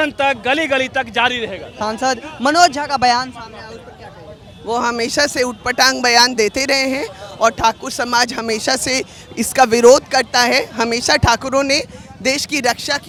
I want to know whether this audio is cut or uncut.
uncut